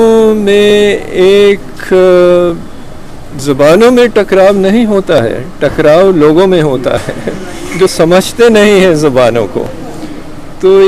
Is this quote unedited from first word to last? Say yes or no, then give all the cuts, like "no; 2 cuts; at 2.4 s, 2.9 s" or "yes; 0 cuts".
yes; 0 cuts